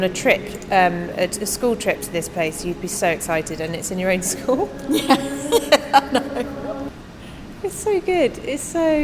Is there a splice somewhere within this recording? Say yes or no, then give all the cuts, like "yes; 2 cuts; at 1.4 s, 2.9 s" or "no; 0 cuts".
yes; 1 cut; at 7.0 s